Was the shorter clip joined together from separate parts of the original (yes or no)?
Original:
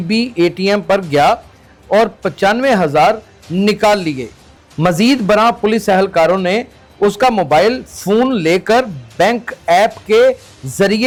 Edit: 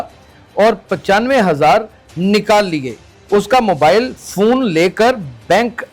yes